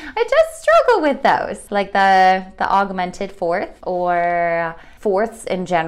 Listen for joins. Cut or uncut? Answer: cut